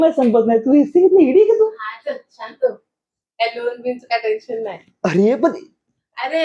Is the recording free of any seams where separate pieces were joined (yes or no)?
yes